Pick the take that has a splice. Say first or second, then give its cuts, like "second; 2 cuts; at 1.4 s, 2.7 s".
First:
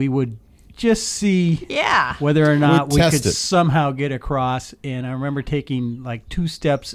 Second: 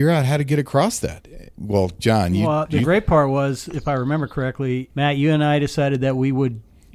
second; 3 cuts; at 1.5 s, 2.4 s, 4.9 s